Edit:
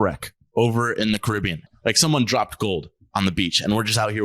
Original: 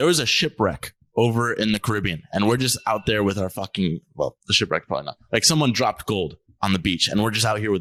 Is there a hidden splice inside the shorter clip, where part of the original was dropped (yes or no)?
yes